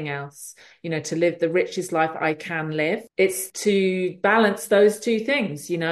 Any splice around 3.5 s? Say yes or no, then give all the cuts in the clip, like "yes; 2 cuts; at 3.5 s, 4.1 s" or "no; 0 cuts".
yes; 1 cut; at 3.5 s